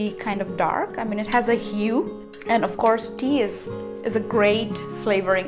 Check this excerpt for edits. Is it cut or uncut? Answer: cut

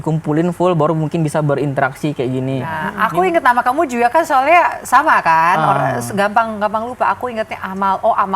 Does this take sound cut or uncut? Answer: cut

